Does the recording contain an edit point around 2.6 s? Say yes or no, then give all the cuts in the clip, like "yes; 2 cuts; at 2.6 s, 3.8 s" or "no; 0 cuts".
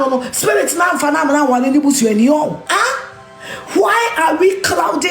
yes; 1 cut; at 2.6 s